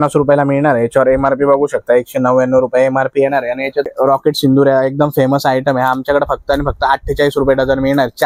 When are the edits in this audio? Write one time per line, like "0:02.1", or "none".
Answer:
0:03.9